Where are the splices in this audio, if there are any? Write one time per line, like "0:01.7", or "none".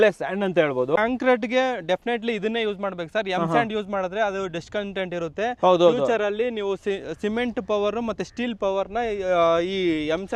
0:01.0